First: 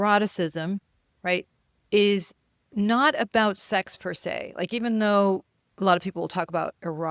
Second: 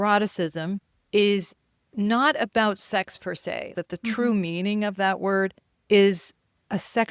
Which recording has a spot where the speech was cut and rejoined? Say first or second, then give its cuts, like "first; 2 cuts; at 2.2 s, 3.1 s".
second; 3 cuts; at 0.9 s, 3.7 s, 5.7 s